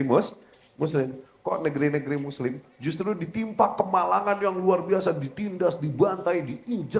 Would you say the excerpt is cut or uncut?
cut